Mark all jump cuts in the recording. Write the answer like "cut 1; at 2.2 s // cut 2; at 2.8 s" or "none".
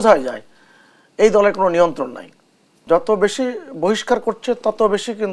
cut 1; at 2.8 s